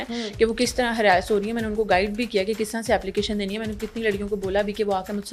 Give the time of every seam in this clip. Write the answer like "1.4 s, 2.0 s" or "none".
none